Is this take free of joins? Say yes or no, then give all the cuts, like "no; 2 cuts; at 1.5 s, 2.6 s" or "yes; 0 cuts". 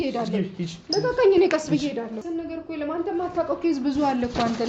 no; 1 cut; at 2.2 s